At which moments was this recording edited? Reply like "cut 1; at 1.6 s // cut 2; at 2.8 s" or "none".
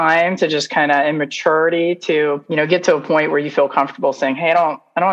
cut 1; at 2.4 s